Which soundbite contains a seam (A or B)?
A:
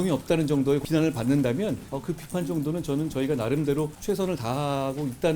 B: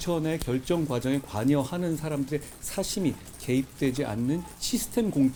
A